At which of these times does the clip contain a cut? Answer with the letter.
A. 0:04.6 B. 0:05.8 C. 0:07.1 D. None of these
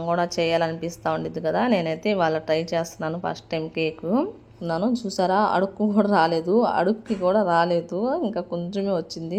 A